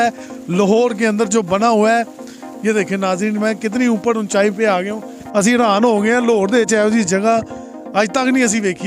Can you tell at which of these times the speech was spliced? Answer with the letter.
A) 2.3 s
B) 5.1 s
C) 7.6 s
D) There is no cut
B